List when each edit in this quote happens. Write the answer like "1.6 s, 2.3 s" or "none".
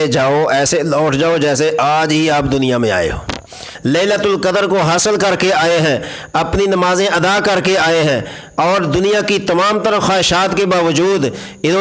3.7 s